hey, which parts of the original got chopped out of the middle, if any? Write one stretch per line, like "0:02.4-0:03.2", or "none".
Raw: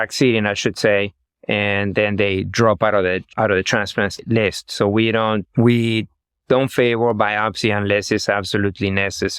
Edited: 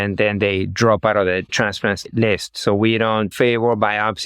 0:03.3-0:03.7
0:05.5-0:06.7